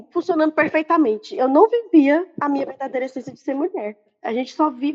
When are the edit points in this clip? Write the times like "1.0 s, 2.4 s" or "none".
1.3 s, 2.3 s, 4.1 s